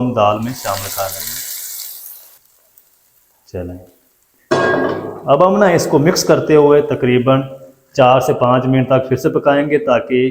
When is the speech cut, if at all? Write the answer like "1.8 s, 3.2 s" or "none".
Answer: 2.3 s